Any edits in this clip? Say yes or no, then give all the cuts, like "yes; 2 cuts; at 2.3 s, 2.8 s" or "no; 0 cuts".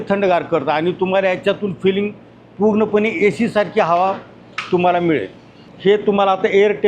no; 0 cuts